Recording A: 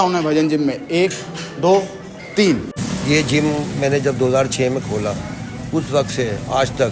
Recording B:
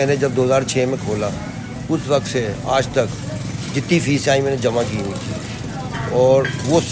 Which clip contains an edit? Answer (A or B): A